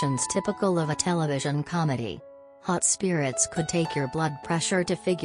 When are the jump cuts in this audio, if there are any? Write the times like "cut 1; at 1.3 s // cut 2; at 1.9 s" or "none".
cut 1; at 2.3 s